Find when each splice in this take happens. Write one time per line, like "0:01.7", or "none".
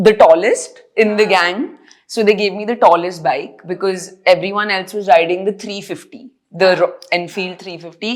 none